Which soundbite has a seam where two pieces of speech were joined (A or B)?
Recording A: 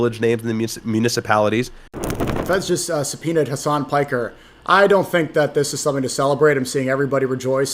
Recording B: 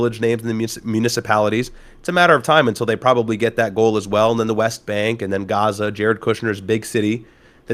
A